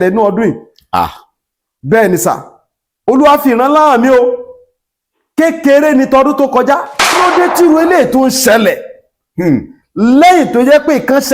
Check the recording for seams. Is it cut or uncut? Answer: cut